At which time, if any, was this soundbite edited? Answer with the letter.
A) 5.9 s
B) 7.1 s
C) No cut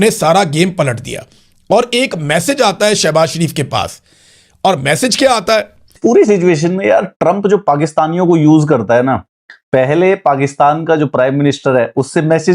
A